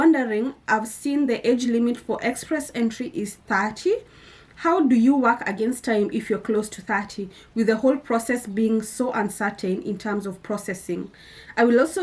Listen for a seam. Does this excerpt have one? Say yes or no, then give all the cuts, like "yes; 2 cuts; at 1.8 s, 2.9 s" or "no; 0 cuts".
no; 0 cuts